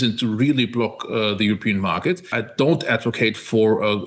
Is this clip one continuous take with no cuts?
no; 1 cut; at 2.3 s

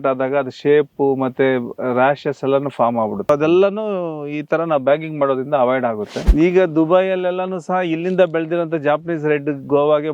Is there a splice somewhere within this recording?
yes; 2 cuts; at 3.3 s, 6.1 s

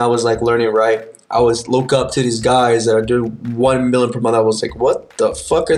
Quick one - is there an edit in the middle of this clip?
no; 0 cuts

